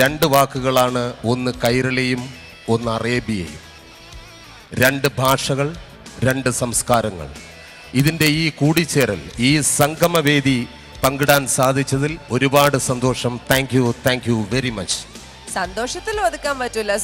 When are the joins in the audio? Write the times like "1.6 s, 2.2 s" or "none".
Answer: 3.7 s